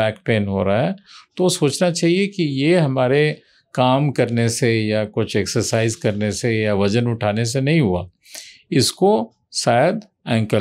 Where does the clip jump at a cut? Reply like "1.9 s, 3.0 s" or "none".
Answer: none